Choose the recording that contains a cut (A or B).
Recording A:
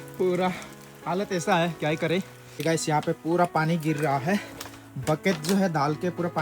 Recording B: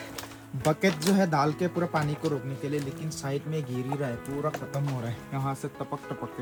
A